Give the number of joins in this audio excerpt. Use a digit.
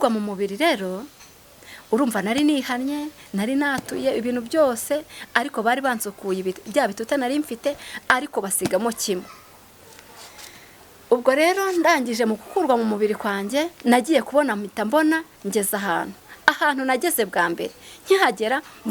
0